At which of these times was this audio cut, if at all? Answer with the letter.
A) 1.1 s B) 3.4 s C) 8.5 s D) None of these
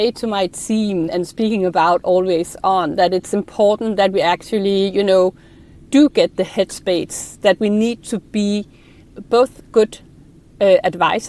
A